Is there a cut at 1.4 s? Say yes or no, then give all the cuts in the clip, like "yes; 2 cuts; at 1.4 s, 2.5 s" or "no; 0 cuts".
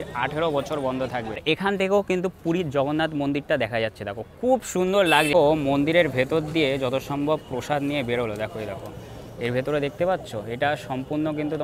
yes; 2 cuts; at 1.4 s, 5.3 s